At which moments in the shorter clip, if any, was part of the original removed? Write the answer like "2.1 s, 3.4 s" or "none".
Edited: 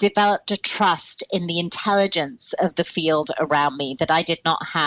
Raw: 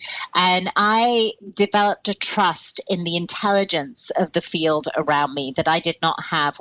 none